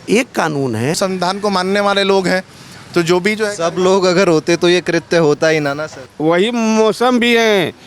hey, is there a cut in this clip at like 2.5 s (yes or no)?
no